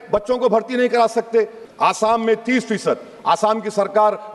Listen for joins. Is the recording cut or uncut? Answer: cut